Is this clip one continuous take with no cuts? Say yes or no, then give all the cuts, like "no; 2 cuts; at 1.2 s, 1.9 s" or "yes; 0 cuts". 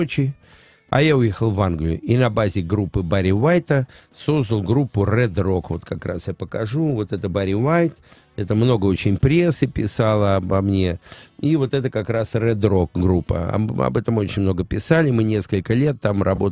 yes; 0 cuts